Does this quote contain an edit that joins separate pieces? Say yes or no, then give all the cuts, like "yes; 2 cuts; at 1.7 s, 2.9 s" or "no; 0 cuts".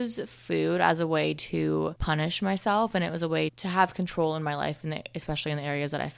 yes; 1 cut; at 2.0 s